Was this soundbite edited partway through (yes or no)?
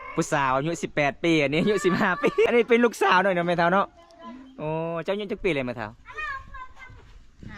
yes